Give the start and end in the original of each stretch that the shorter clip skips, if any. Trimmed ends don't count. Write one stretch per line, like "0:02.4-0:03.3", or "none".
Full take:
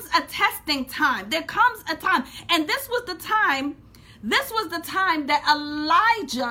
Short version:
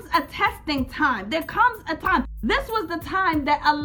0:02.3-0:04.2